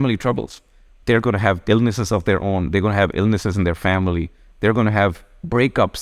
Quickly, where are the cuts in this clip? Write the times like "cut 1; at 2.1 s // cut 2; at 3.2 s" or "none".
none